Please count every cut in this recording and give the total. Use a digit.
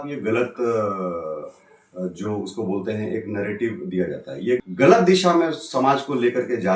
1